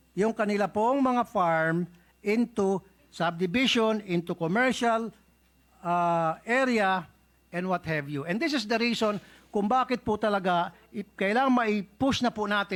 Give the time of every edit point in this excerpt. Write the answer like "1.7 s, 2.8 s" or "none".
none